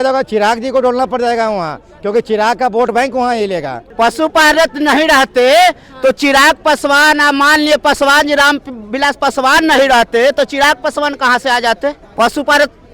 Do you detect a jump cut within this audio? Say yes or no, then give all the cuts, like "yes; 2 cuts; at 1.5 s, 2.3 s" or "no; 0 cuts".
yes; 2 cuts; at 3.8 s, 12.0 s